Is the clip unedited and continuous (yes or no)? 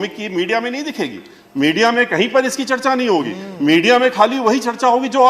yes